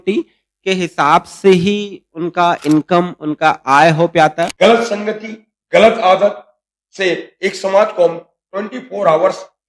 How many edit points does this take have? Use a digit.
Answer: 1